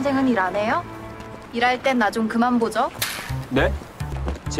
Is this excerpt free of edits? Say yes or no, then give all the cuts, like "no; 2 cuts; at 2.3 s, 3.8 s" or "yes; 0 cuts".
no; 1 cut; at 2.9 s